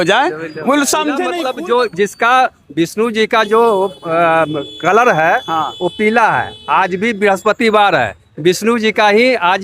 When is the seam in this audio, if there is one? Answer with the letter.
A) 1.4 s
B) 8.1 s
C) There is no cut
A